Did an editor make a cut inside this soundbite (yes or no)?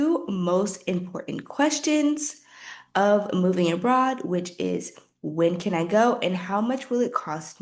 no